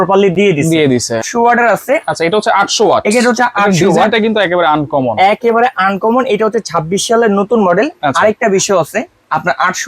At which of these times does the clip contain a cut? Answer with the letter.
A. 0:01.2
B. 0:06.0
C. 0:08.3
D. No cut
A